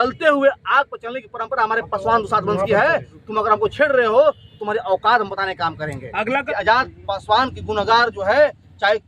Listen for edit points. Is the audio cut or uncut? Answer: cut